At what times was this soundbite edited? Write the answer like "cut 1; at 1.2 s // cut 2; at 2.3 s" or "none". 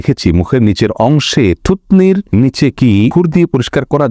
cut 1; at 2.3 s // cut 2; at 3.1 s